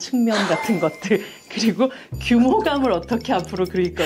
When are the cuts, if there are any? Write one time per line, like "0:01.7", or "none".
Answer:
none